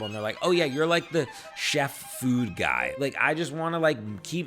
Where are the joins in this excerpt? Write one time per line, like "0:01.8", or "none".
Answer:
0:02.9